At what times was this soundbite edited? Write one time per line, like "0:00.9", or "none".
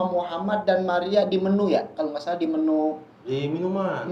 none

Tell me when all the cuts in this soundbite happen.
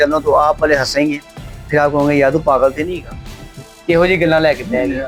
none

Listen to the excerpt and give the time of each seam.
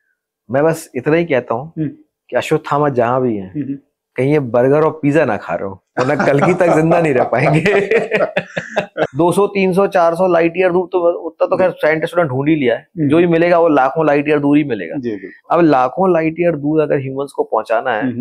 0:09.1

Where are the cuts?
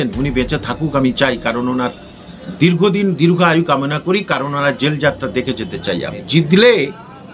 0:06.2

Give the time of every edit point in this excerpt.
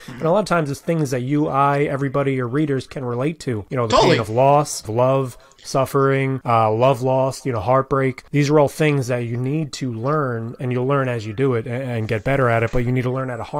0:03.7
0:04.9
0:06.4
0:08.2

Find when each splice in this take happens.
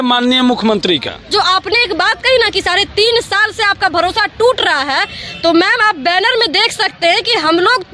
0:01.3

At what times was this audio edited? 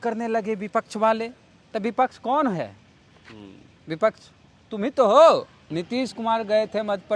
0:05.6

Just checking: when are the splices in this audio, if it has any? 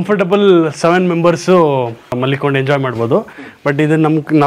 0:02.2

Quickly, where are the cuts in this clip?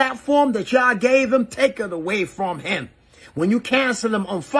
none

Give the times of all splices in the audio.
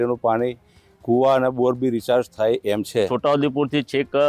0:03.1

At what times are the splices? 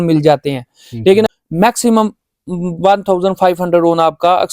0:01.3

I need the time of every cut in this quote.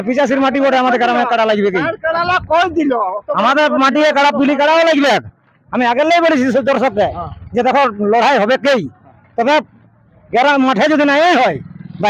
none

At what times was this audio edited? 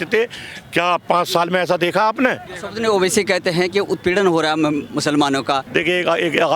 0:02.5
0:05.6

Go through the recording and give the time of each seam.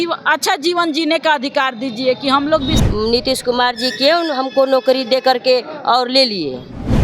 0:02.8

